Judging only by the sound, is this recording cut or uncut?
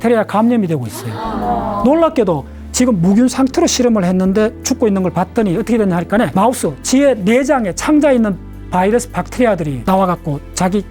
cut